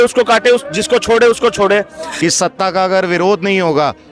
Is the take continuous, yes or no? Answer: no